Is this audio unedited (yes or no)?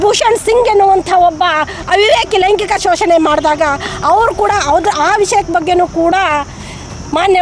yes